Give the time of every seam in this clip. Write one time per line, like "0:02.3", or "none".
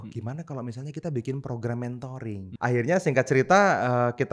0:02.5